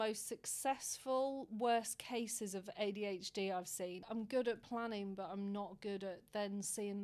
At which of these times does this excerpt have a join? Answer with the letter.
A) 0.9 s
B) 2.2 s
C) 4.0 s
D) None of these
C